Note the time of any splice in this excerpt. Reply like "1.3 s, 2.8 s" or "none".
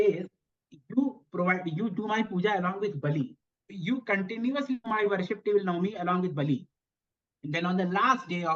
3.4 s